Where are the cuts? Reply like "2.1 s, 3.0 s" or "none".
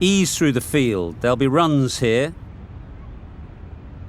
2.4 s